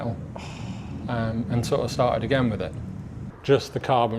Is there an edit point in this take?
yes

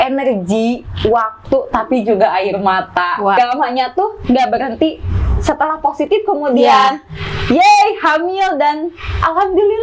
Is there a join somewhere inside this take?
yes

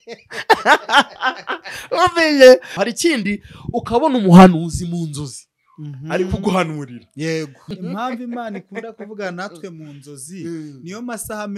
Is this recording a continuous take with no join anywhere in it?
no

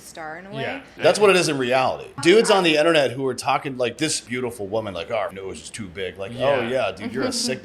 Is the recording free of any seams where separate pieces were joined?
no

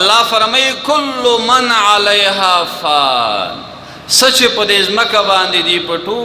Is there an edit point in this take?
no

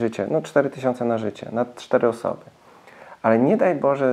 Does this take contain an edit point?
no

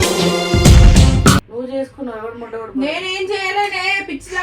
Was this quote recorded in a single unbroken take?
no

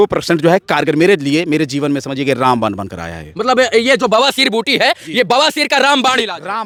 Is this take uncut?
yes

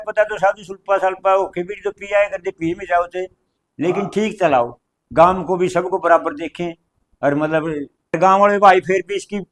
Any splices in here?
yes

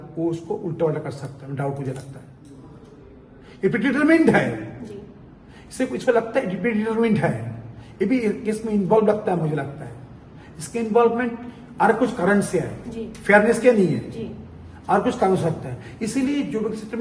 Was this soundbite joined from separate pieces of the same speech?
no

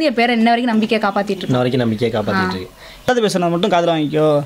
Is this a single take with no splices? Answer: no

